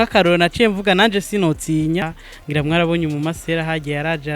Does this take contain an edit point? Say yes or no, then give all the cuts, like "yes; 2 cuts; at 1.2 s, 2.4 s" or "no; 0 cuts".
yes; 1 cut; at 2.2 s